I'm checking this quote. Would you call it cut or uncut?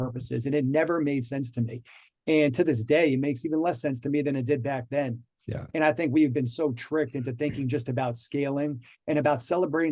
uncut